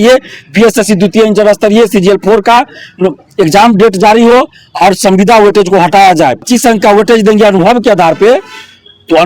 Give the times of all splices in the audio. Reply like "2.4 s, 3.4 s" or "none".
6.4 s